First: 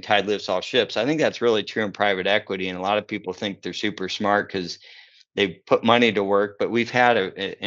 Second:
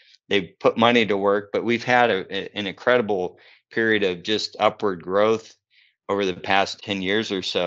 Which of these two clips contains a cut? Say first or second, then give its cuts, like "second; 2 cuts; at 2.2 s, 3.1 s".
second; 1 cut; at 6.8 s